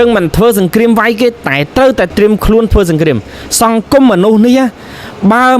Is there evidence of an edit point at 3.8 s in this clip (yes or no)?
no